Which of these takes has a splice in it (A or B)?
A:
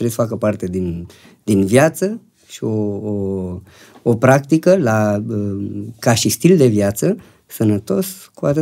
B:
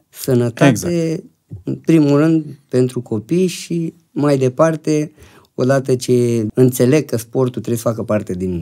B